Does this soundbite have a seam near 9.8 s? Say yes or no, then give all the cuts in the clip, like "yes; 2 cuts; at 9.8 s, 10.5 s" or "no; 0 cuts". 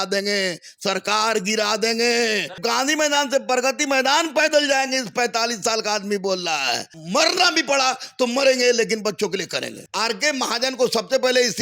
yes; 3 cuts; at 2.6 s, 6.9 s, 9.8 s